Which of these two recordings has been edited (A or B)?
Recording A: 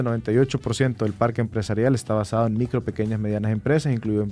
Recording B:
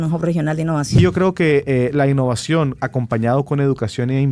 B